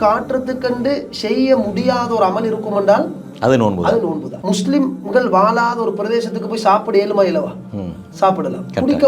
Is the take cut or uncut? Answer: cut